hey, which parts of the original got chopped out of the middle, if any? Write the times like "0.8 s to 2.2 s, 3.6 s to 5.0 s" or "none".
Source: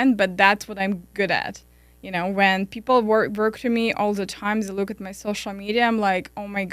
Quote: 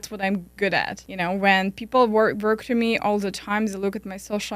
1.6 s to 2.0 s